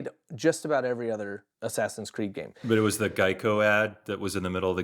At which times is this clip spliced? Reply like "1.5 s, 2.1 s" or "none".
1.4 s, 2.7 s